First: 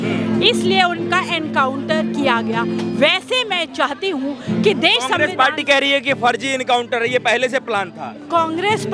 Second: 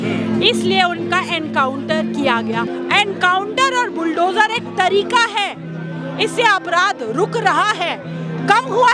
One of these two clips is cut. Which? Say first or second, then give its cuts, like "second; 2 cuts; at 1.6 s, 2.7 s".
second; 1 cut; at 2.7 s